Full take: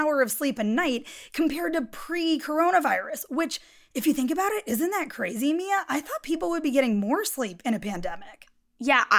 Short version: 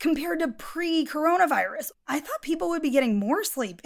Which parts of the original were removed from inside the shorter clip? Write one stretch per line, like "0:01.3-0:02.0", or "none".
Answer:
0:03.3-0:05.8